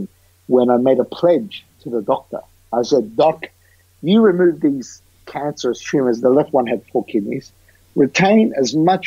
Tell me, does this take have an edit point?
no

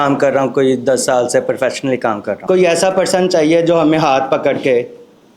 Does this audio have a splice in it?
yes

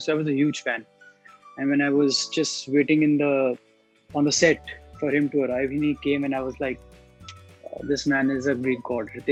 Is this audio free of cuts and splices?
yes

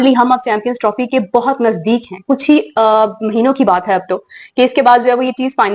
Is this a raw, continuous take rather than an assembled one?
yes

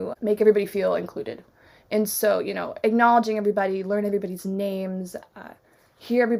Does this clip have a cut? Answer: no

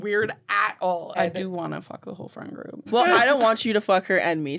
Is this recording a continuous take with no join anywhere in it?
no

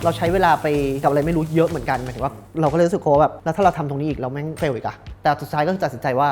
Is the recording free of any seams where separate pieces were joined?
no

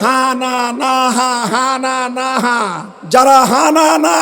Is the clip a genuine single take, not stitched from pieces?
no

